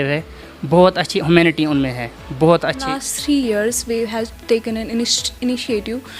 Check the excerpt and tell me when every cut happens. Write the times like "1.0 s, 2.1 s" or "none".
3.0 s